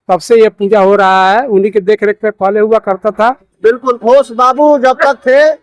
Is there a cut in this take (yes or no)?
no